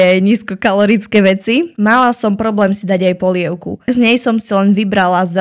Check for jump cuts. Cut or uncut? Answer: cut